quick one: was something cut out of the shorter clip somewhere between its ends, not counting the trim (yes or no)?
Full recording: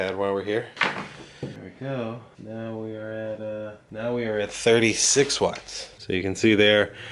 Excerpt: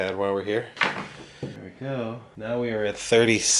yes